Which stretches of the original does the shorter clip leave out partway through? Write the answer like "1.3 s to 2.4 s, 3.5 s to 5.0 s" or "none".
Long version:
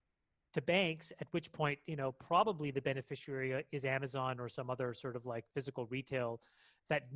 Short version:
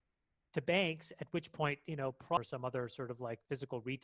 2.4 s to 4.4 s